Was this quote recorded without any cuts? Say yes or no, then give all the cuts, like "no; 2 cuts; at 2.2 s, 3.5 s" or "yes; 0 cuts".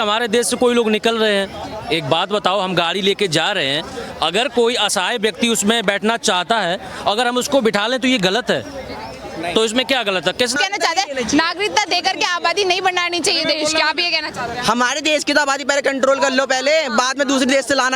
no; 1 cut; at 10.5 s